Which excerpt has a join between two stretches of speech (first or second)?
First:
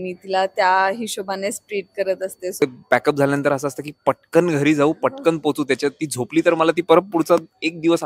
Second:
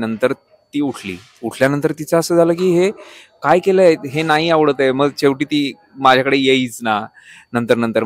first